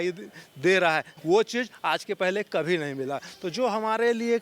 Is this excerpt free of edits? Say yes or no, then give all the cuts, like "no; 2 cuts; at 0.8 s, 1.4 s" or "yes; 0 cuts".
no; 1 cut; at 1.1 s